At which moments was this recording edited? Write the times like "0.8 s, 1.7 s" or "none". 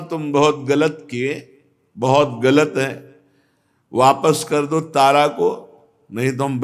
none